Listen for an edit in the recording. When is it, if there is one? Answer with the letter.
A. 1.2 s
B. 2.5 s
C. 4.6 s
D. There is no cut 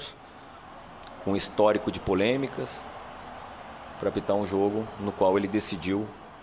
B